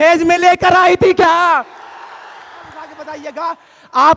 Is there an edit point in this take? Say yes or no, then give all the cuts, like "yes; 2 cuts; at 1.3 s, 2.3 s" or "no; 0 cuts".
yes; 1 cut; at 2.9 s